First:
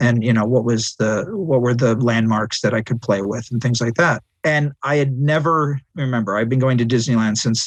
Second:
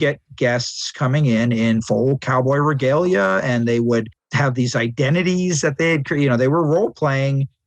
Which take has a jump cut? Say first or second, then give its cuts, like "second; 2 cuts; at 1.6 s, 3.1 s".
second; 1 cut; at 4.2 s